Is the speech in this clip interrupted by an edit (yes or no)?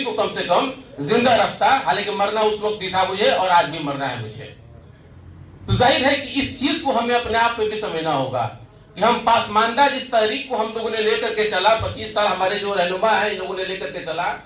no